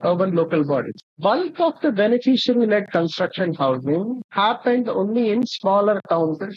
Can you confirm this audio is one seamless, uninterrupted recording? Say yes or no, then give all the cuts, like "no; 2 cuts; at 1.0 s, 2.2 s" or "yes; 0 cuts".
no; 1 cut; at 1.0 s